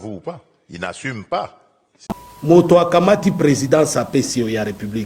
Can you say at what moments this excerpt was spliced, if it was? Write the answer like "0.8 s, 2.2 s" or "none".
2.0 s